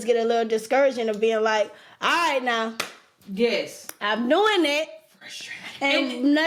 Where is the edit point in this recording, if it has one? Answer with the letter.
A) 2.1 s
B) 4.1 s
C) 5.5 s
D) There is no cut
D